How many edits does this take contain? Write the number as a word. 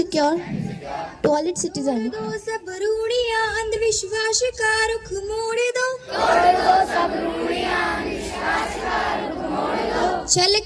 one